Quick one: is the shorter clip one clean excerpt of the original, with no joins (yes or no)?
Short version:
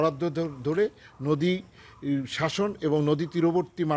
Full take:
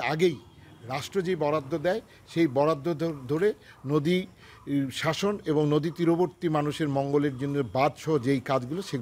yes